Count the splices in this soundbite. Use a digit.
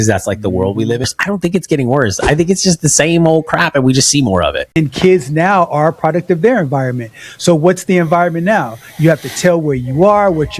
2